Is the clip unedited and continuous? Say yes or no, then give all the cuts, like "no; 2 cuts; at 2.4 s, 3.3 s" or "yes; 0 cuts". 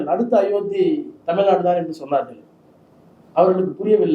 yes; 0 cuts